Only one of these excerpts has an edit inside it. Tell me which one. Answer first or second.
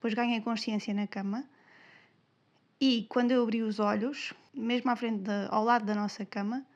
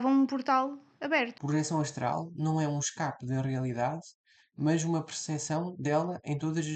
second